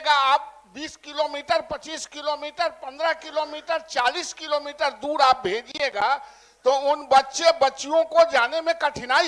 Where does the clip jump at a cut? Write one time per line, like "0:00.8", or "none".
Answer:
none